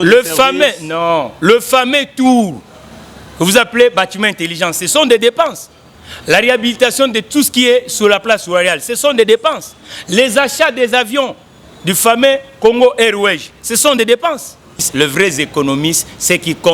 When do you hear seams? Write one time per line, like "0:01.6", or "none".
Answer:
0:14.9